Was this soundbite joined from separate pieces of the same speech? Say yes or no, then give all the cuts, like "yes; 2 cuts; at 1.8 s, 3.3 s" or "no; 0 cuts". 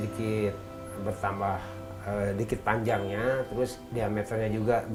no; 0 cuts